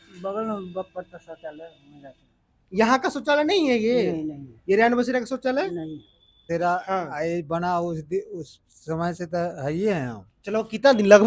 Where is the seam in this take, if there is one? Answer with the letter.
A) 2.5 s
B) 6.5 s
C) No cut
B